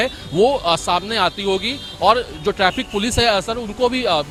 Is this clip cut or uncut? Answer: uncut